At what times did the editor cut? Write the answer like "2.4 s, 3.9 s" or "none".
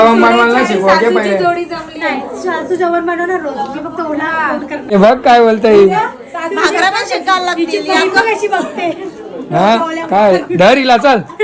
4.9 s